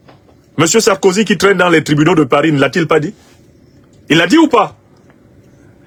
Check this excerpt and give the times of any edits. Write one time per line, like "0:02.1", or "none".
none